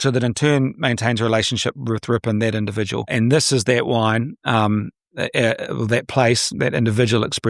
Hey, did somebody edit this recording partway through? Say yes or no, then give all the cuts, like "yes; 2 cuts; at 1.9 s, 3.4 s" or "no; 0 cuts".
no; 0 cuts